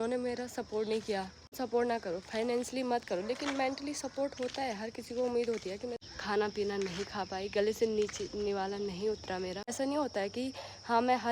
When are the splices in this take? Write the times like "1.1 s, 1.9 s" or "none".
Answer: 1.6 s, 5.9 s, 9.7 s